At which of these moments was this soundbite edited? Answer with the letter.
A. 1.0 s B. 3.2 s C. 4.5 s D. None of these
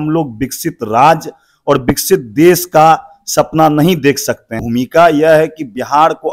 C